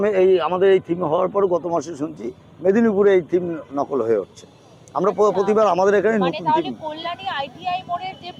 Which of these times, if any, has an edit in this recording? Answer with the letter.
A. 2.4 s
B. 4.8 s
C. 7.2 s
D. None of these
D